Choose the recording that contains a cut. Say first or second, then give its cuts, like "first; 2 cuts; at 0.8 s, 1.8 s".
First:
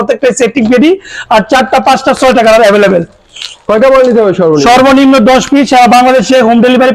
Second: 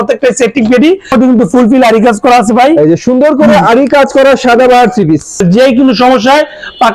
second; 2 cuts; at 1.1 s, 5.4 s